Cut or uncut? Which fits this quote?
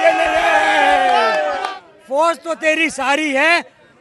cut